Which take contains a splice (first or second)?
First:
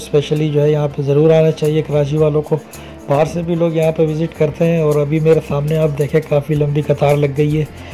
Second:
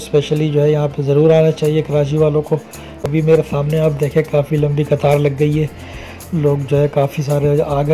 second